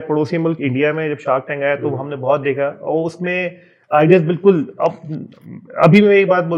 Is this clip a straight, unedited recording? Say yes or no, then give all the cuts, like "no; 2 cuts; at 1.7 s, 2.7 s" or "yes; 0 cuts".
yes; 0 cuts